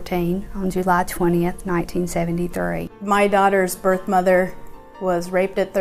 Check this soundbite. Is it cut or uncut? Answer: cut